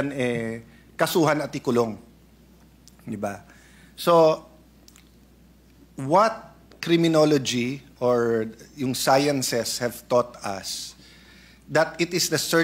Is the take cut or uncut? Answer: uncut